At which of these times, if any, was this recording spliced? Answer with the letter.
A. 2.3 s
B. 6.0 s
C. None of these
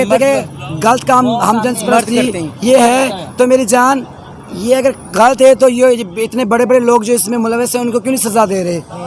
C